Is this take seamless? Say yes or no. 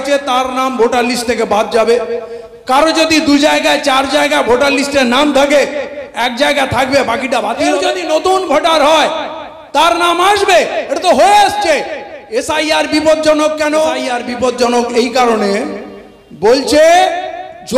no